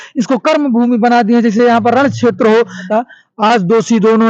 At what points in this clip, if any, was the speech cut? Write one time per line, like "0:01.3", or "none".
0:02.9